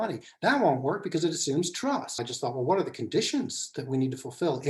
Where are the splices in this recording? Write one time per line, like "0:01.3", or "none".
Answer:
0:02.3